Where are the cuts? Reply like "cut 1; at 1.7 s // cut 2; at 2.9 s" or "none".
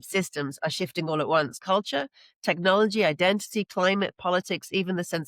cut 1; at 1.6 s